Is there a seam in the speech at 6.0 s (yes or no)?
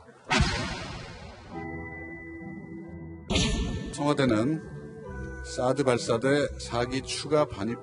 yes